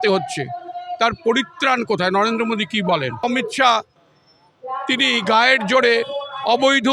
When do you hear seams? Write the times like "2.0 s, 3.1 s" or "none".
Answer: 3.2 s